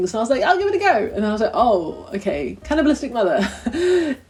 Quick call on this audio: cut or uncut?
uncut